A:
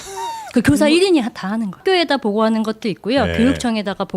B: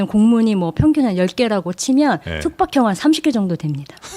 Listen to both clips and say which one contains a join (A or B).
A